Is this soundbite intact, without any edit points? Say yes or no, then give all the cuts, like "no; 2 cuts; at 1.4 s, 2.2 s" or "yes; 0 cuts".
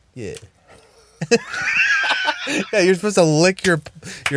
yes; 0 cuts